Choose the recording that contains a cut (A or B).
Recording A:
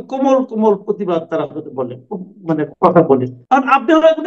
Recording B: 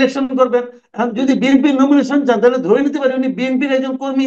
A